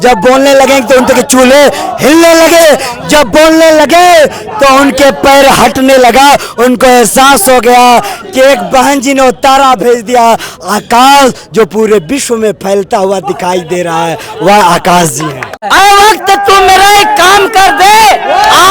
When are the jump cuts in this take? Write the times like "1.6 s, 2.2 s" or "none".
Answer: 15.6 s